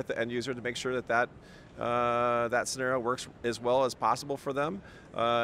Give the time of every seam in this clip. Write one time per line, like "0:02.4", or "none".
none